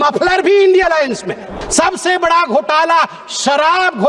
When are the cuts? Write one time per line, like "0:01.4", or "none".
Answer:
0:01.6